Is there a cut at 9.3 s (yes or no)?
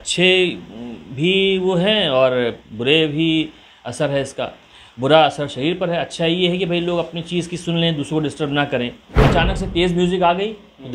yes